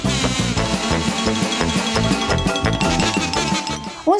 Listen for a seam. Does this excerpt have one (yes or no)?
no